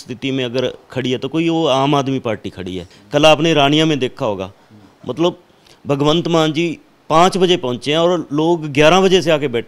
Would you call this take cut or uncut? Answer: cut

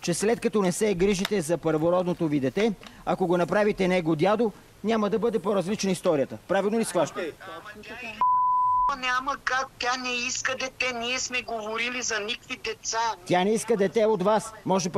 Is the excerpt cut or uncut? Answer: uncut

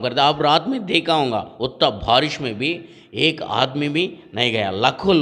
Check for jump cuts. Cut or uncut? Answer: uncut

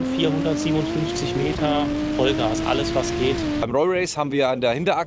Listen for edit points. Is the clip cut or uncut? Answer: cut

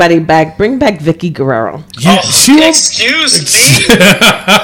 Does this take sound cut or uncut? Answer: cut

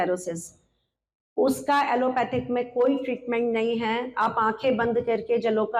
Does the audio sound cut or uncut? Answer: uncut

